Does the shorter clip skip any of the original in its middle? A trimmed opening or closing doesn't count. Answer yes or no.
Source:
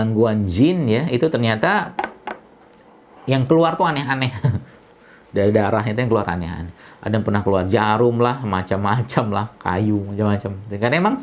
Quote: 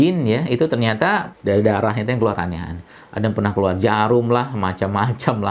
yes